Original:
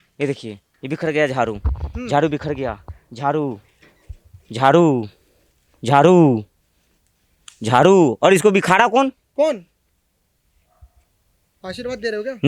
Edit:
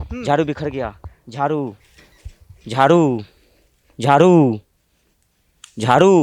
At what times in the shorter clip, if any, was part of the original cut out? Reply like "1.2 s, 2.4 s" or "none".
none